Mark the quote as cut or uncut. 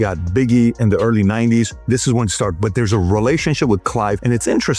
uncut